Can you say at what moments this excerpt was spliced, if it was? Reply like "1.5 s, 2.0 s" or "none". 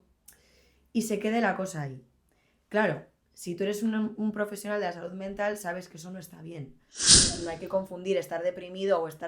7.1 s